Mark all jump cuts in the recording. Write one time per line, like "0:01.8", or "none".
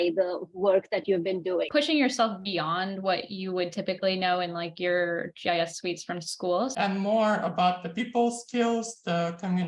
0:01.7
0:06.7